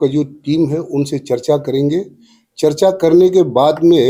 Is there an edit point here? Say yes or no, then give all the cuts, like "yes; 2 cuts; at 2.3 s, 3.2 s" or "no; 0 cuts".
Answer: no; 0 cuts